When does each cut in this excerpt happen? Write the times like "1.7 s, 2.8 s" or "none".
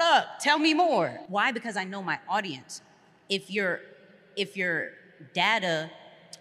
1.2 s